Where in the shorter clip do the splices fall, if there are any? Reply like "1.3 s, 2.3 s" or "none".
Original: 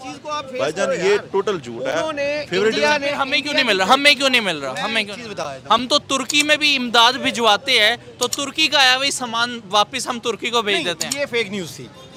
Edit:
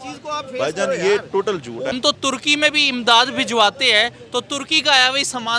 1.9 s